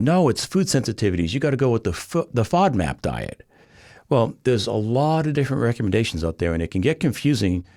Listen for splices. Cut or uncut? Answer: uncut